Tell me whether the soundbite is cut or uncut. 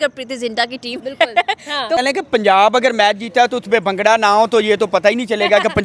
cut